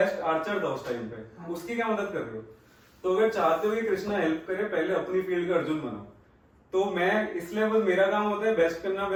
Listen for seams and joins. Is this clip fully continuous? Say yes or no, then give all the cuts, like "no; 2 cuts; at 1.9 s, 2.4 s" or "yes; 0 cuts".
yes; 0 cuts